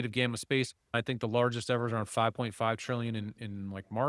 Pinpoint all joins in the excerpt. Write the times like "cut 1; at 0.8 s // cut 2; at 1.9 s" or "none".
cut 1; at 1.0 s